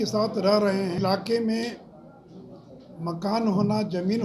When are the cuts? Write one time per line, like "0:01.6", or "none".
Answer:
0:01.0